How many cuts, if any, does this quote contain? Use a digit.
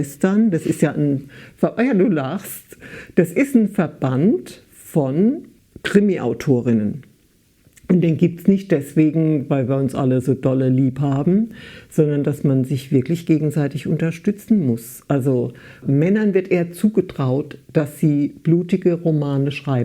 0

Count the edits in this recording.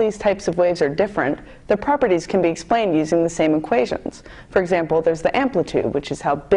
1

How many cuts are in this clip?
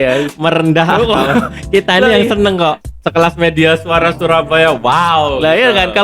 1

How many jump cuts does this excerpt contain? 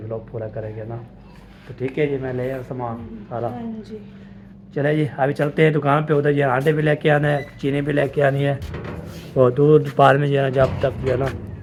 0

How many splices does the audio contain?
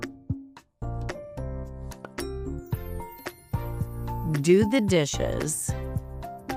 0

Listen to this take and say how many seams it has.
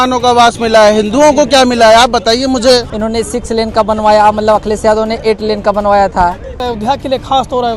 2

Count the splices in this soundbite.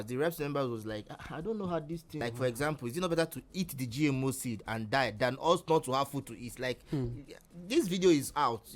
1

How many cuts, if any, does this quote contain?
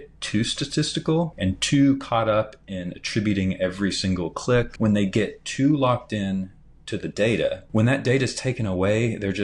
3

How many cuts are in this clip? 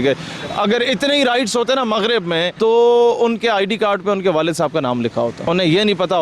2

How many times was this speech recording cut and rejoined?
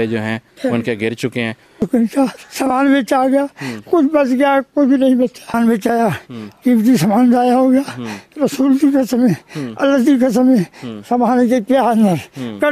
2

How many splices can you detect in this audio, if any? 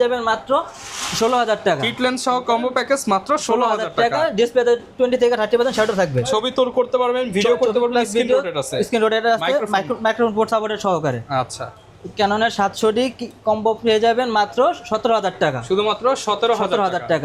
0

